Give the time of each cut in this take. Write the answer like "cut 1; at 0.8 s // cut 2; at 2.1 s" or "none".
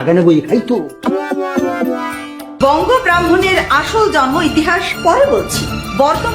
cut 1; at 2.5 s